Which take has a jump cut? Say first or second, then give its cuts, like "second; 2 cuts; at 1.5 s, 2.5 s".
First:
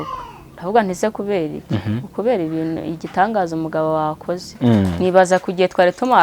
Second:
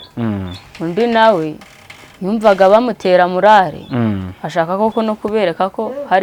first; 1 cut; at 4.5 s